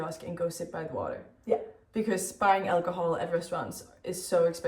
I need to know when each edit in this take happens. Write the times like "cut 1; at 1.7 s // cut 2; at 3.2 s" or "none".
none